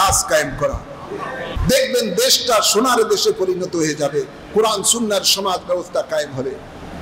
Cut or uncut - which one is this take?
cut